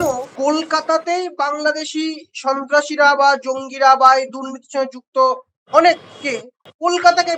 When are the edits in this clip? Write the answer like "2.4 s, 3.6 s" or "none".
none